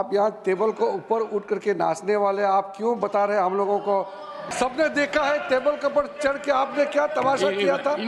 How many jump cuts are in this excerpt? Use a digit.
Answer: 1